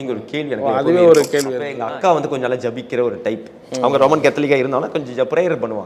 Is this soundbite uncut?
no; 1 cut; at 1.7 s

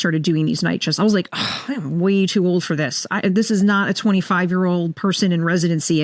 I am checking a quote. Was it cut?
no; 0 cuts

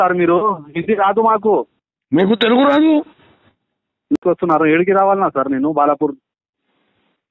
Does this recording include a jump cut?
yes; 1 cut; at 4.2 s

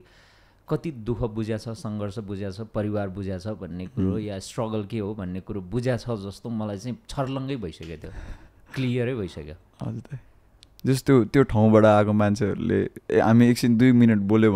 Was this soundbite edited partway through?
no; 0 cuts

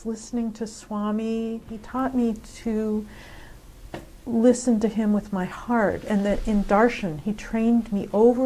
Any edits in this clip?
yes; 1 cut; at 1.8 s

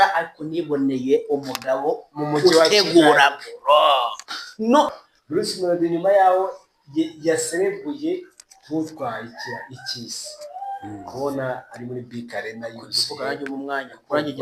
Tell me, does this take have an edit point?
yes; 1 cut; at 4.9 s

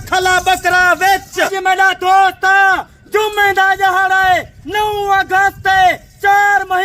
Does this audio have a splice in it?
yes; 1 cut; at 1.7 s

